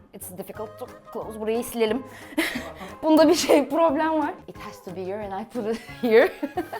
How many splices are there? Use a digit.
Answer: 1